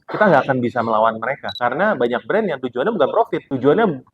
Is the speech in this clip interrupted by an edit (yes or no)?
yes